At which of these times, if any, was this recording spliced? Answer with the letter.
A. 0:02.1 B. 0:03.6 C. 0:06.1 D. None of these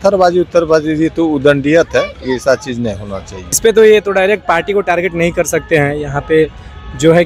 B